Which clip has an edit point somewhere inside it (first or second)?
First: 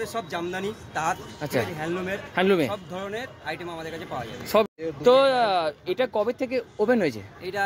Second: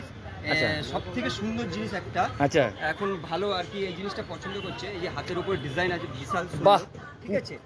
first